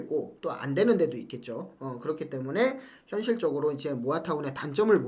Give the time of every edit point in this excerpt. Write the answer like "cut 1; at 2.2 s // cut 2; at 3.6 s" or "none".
none